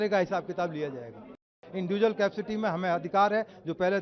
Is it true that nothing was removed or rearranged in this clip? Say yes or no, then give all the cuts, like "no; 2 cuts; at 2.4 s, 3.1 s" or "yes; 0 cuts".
no; 1 cut; at 1.6 s